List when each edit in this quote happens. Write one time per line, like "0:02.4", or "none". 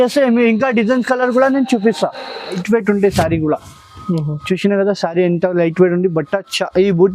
0:02.6